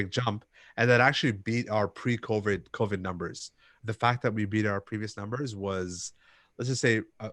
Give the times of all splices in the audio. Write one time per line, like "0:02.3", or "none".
0:03.6